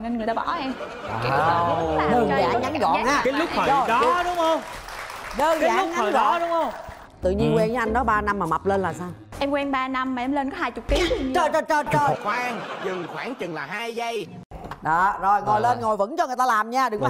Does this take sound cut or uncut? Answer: cut